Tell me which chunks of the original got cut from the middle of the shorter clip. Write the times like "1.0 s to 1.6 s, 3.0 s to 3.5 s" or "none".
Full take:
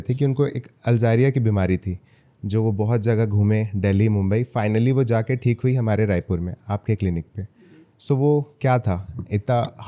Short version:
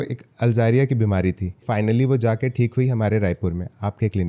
2.1 s to 4.5 s